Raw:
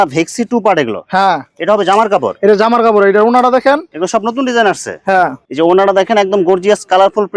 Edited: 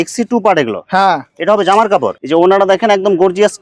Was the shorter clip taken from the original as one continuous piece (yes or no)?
no